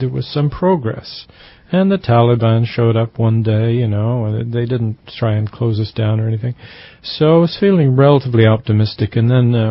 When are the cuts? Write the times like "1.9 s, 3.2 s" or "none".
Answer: none